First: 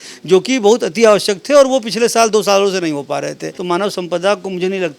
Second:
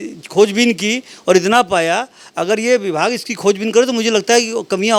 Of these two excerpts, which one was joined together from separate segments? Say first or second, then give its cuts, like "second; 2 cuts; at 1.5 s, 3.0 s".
first; 1 cut; at 3.5 s